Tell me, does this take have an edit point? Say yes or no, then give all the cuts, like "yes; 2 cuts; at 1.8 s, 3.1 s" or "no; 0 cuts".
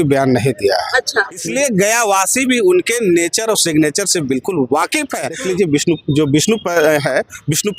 yes; 2 cuts; at 1.4 s, 5.4 s